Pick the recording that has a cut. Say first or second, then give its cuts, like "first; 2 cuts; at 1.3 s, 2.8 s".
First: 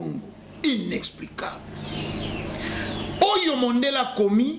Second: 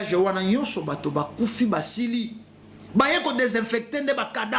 first; 1 cut; at 1.7 s